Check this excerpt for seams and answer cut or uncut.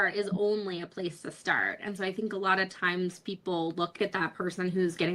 cut